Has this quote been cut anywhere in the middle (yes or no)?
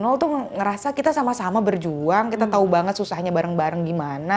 no